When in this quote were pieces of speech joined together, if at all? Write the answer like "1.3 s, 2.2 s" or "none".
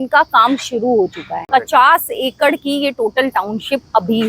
1.3 s